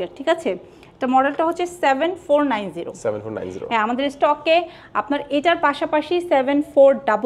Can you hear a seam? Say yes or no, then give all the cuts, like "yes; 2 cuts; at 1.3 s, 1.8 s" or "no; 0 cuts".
no; 0 cuts